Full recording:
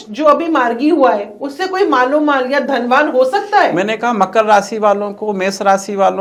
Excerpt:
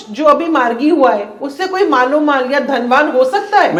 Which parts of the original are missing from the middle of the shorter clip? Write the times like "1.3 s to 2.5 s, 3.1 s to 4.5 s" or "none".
none

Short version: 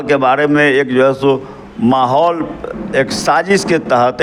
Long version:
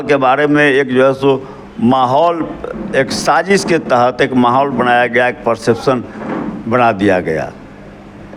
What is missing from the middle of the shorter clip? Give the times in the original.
none

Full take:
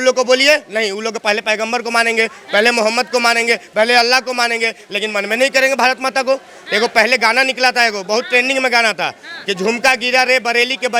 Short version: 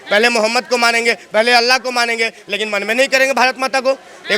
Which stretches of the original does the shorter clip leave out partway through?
none

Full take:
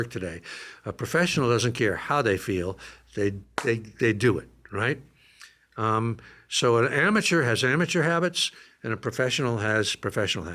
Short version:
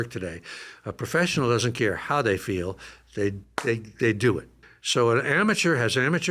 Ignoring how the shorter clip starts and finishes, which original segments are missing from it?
4.6 s to 6.3 s

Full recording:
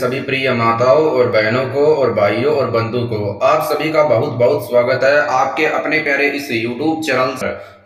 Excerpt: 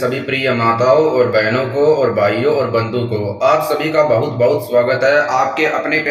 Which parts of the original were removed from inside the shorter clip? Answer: none

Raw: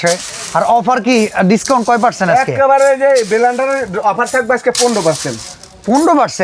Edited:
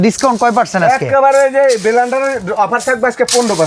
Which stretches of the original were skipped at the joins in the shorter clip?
none

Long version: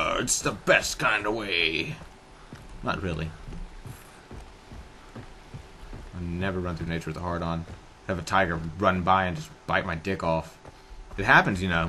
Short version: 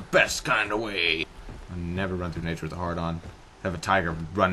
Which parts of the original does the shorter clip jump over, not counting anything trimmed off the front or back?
1.8 s to 5.7 s

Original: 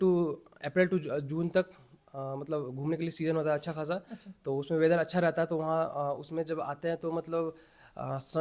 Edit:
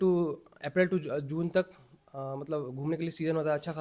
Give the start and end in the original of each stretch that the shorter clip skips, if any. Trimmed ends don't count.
none

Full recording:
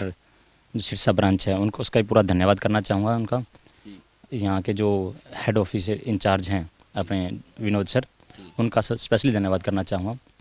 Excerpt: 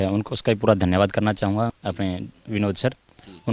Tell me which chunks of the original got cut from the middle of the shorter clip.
3.2 s to 6.8 s

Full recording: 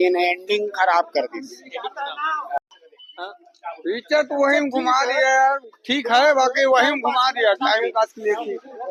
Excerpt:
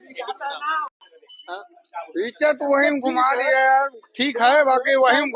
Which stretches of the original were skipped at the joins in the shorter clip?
2.5 s to 2.6 s

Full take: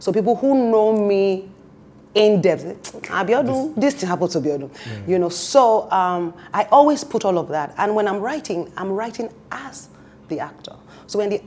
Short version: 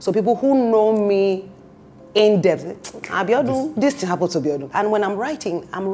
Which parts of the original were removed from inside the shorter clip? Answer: 4.7 s to 7.7 s

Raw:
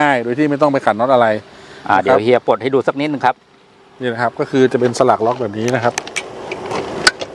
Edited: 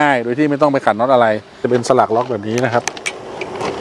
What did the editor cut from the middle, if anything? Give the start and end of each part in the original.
1.6 s to 4.7 s

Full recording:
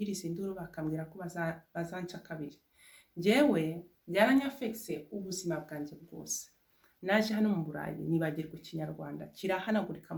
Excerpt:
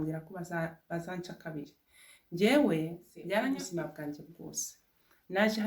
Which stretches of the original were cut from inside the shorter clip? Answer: 4.5 s to 5.4 s

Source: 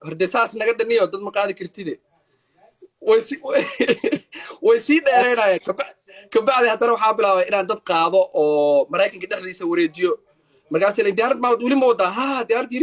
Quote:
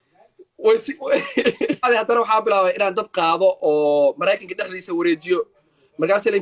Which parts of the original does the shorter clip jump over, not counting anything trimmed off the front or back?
4.3 s to 6.6 s

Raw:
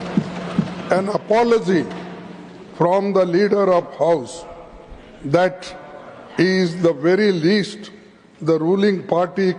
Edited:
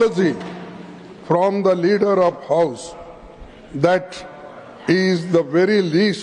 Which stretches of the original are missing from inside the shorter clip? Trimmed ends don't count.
none

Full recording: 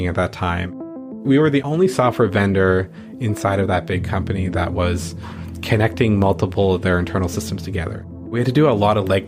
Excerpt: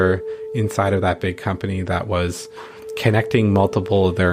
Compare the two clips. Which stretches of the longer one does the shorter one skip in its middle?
none

